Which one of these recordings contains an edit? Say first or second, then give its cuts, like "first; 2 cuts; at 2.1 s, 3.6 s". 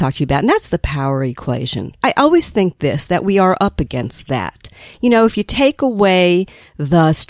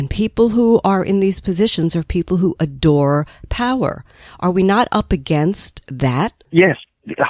first; 1 cut; at 1.8 s